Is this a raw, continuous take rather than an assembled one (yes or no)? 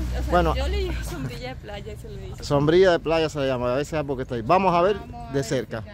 yes